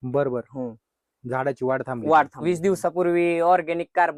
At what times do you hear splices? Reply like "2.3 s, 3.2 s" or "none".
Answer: 2.4 s